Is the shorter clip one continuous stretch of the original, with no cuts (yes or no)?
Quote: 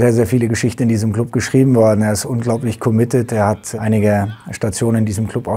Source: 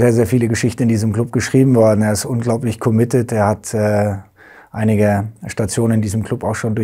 no